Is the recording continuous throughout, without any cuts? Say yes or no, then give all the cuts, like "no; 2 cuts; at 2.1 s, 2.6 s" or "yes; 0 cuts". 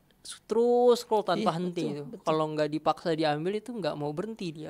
yes; 0 cuts